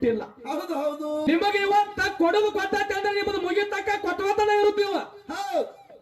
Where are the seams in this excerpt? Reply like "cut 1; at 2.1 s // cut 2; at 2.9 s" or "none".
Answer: cut 1; at 1.2 s